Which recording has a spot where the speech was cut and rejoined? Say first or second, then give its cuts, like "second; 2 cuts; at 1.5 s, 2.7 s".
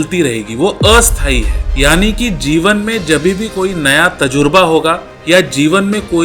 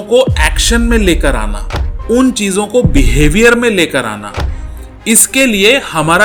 first; 2 cuts; at 1.6 s, 5.1 s